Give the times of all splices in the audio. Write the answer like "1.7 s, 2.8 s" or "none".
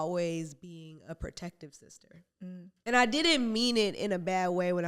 2.7 s